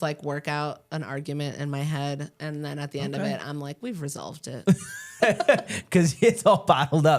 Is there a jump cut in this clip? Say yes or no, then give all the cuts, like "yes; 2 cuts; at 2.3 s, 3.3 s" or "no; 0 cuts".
yes; 1 cut; at 5.1 s